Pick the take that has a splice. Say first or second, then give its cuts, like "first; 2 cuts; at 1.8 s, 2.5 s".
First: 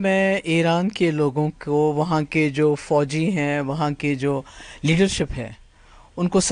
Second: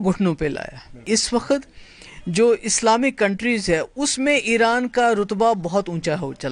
second; 1 cut; at 1.0 s